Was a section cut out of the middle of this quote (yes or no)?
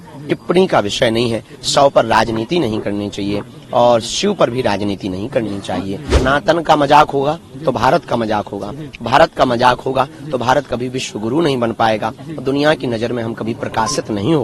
yes